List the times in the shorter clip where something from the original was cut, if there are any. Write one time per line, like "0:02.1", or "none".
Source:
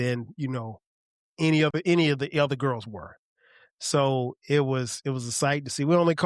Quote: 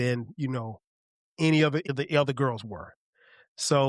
0:01.9